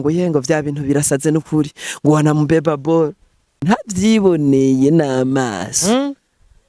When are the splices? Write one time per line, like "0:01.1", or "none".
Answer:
0:03.6